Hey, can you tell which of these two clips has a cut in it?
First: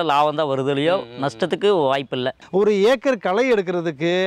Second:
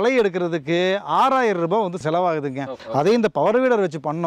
first; 1 cut; at 2.4 s

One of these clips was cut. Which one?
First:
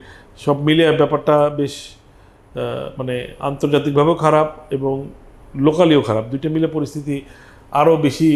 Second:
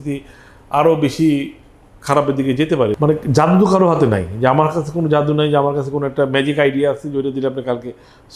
second; 1 cut; at 3.0 s

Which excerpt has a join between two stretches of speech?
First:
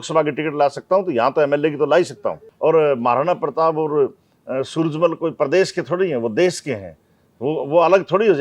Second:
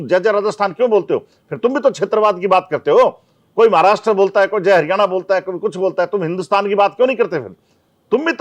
first; 1 cut; at 2.4 s

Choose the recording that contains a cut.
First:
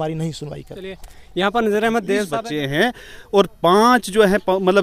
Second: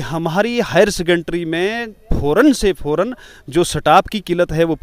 first; 1 cut; at 2.3 s

